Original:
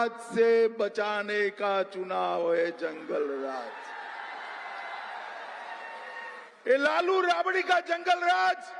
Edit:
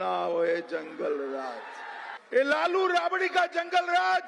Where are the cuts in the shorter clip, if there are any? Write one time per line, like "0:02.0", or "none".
0:02.1